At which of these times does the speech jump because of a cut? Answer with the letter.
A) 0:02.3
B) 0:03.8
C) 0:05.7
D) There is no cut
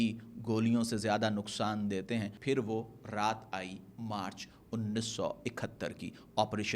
A